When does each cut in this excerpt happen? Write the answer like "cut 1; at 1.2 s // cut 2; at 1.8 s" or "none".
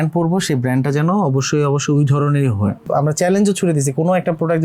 cut 1; at 2.8 s